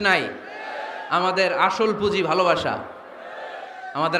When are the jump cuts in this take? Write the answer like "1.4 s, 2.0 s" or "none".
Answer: none